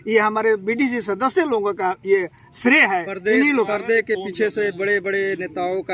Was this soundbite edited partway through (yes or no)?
no